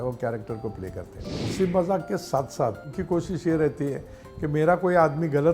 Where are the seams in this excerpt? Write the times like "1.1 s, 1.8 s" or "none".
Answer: 1.4 s, 2.9 s